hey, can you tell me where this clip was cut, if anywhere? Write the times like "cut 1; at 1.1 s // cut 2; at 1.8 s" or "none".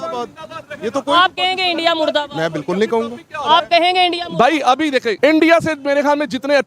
cut 1; at 5.1 s